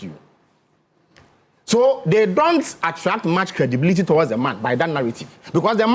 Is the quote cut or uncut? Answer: uncut